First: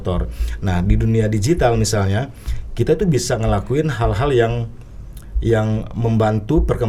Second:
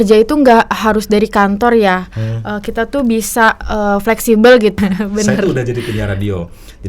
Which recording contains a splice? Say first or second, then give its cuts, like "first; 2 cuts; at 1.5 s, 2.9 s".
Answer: second; 1 cut; at 4.8 s